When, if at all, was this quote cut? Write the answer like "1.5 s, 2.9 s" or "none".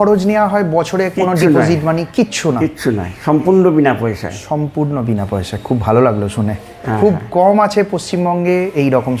none